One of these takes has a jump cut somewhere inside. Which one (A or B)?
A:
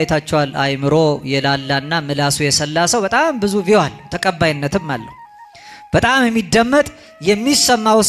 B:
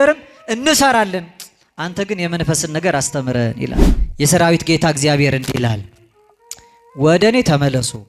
B